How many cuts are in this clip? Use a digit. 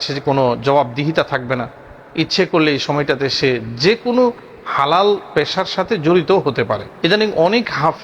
1